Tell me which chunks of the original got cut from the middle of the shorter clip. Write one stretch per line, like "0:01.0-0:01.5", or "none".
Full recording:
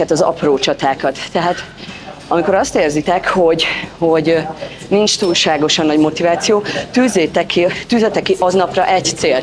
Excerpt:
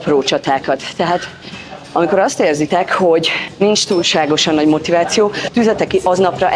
0:03.8-0:04.7
0:06.8-0:07.8

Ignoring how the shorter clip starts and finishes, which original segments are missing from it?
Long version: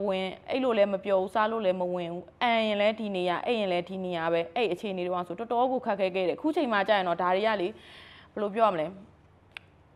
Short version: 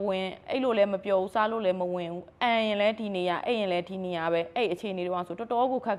none

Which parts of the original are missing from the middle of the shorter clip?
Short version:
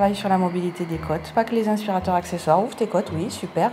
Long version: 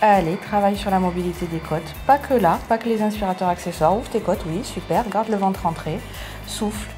0:01.9-0:02.6

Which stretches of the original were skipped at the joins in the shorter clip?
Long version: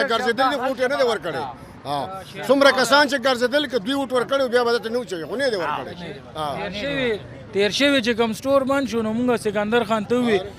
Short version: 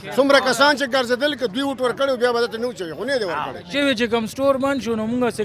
0:06.0-0:07.8

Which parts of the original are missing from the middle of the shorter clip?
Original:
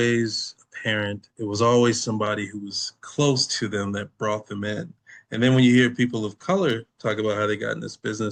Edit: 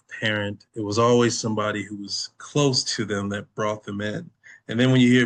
none

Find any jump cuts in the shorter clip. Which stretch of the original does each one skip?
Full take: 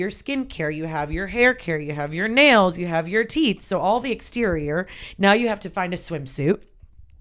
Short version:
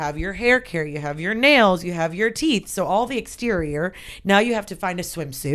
none

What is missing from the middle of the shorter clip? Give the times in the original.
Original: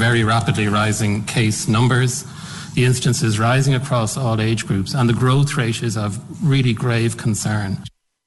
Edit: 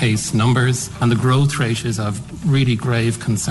0:02.3-0:04.9

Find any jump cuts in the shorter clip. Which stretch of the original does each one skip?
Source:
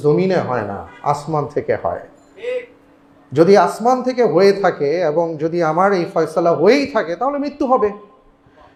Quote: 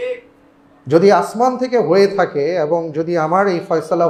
none

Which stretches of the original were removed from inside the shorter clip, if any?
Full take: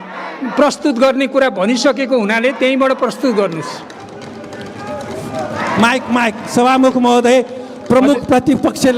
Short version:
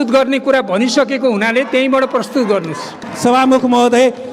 0:04.0-0:06.4

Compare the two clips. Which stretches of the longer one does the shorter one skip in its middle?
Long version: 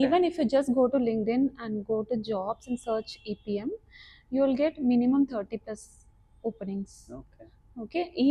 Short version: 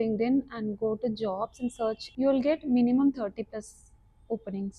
0:03.1-0:04.2

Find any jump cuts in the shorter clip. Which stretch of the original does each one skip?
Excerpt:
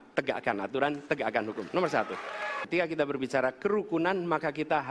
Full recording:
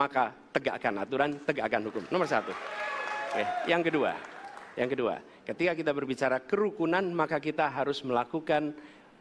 0:03.0-0:05.5

